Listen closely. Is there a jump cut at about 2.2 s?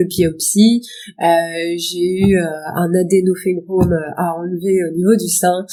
no; 0 cuts

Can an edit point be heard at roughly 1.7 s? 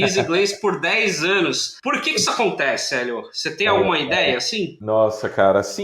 yes; 2 cuts; at 1.7 s, 4.8 s

